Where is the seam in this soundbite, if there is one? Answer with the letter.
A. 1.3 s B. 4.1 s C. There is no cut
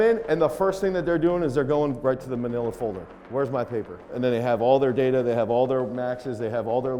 B